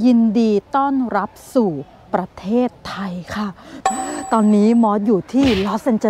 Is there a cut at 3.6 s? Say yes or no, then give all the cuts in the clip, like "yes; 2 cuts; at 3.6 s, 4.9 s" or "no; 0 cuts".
yes; 1 cut; at 3.6 s